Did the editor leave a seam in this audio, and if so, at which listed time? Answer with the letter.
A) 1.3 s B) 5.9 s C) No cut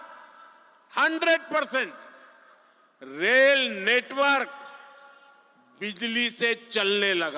C